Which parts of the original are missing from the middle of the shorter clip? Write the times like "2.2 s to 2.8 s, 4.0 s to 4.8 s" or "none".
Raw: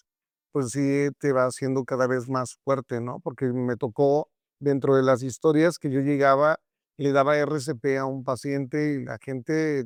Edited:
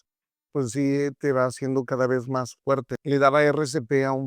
2.9 s to 6.8 s